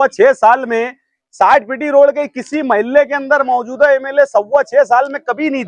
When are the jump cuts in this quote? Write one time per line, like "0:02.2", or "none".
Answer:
none